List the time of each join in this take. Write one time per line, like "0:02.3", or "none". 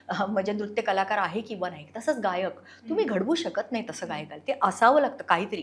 none